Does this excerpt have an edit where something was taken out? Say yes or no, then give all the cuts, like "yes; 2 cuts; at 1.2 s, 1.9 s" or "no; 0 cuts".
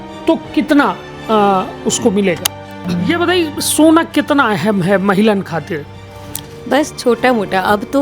yes; 1 cut; at 2.9 s